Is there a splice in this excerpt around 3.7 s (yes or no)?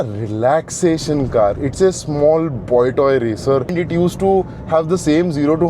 yes